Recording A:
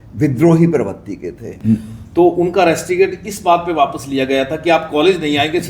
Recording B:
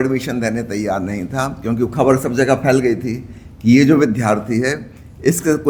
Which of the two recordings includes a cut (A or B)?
A